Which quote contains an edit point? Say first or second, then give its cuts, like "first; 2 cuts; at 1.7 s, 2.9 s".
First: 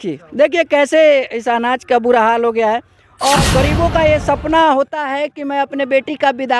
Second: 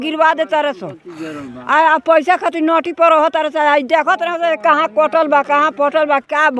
first; 1 cut; at 3.4 s